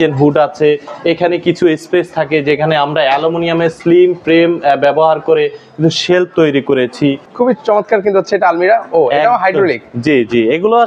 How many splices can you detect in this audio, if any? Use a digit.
1